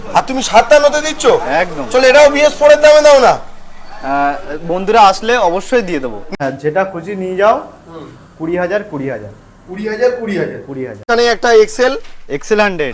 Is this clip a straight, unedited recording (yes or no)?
no